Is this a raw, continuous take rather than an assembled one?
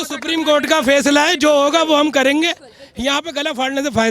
yes; 0 cuts

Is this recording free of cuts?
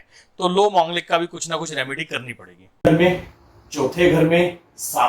no; 1 cut; at 2.9 s

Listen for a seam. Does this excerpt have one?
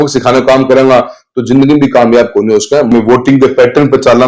yes; 1 cut; at 2.9 s

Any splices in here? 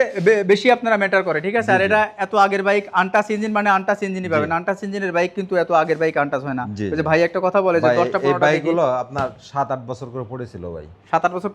no; 0 cuts

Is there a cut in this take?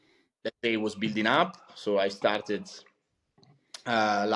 no; 0 cuts

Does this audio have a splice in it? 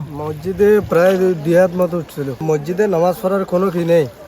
yes; 1 cut; at 2.4 s

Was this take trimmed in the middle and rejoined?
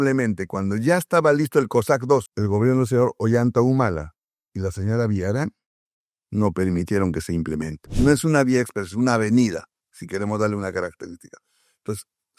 yes; 2 cuts; at 2.3 s, 7.8 s

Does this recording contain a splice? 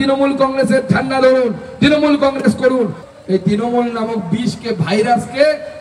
yes; 1 cut; at 3.1 s

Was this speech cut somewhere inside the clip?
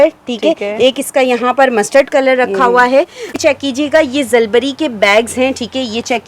yes; 1 cut; at 3.3 s

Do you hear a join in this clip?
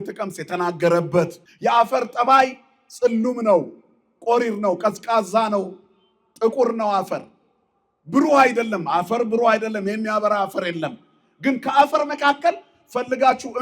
yes; 1 cut; at 1.4 s

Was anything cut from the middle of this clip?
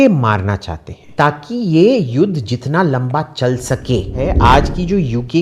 yes; 2 cuts; at 1.0 s, 4.1 s

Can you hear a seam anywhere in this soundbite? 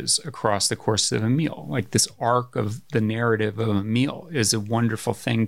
no; 0 cuts

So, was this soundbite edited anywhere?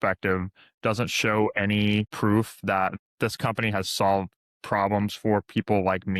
yes; 1 cut; at 2.1 s

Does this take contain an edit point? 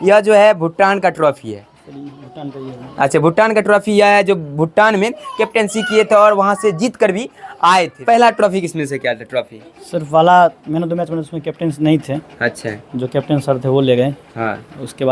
no; 0 cuts

